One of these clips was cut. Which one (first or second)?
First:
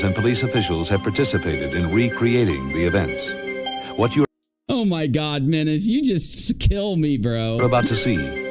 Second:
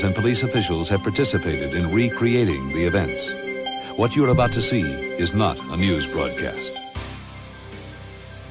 second